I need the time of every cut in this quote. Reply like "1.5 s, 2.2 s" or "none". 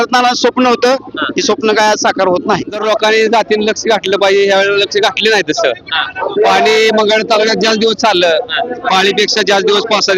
2.8 s